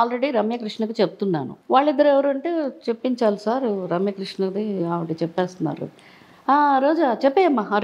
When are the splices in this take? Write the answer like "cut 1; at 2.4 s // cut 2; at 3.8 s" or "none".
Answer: cut 1; at 1.5 s